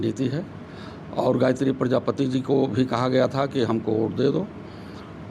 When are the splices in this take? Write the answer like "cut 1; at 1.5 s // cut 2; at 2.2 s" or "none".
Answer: none